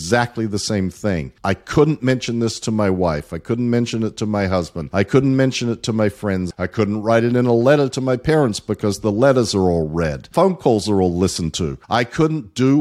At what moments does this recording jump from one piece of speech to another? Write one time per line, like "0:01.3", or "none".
0:01.3
0:04.8
0:06.5
0:10.2
0:11.7